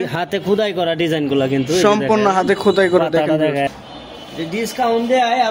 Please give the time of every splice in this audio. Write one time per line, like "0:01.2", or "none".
0:03.7